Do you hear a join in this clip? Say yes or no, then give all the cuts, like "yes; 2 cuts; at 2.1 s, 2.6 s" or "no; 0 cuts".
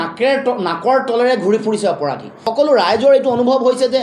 yes; 1 cut; at 2.4 s